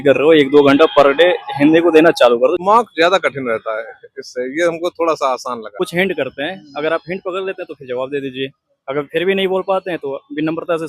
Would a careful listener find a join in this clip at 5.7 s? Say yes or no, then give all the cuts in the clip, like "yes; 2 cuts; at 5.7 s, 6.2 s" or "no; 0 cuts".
yes; 2 cuts; at 2.6 s, 5.7 s